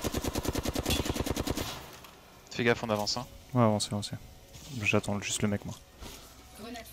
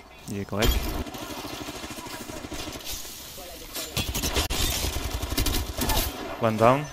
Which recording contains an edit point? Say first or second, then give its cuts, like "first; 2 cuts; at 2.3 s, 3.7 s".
second; 1 cut; at 1.0 s